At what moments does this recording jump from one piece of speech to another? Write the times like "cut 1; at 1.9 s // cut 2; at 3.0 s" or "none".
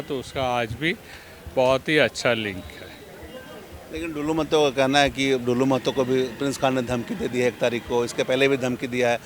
none